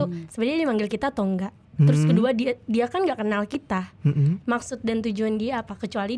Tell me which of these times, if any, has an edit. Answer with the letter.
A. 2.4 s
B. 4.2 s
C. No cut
C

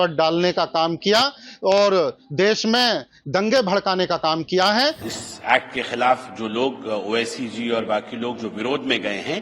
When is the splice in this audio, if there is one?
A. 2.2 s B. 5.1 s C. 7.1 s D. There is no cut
B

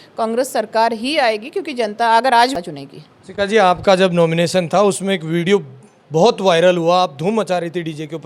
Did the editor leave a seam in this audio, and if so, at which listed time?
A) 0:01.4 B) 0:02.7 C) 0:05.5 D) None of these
B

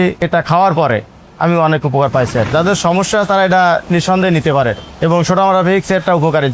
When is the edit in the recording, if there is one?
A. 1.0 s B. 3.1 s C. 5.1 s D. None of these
D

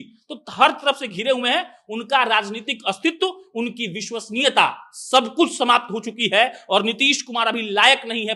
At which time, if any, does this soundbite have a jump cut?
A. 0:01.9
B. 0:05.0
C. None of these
C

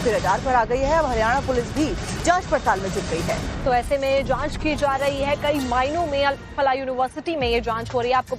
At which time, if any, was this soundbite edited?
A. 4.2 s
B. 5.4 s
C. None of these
A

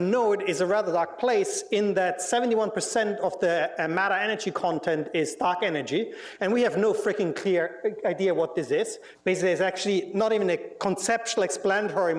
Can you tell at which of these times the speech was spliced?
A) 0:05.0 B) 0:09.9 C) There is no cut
A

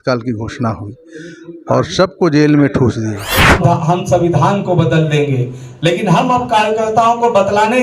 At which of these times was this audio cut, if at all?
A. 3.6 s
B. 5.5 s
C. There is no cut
A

